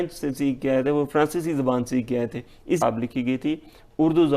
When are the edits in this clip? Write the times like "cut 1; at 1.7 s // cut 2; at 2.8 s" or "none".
cut 1; at 2.8 s